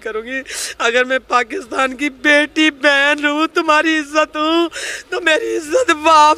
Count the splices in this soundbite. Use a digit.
0